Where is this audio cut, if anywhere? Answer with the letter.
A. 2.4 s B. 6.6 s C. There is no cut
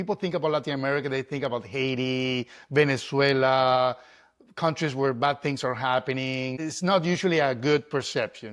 B